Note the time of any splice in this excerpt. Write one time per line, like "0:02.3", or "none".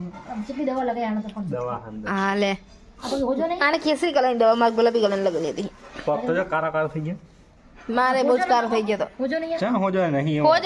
none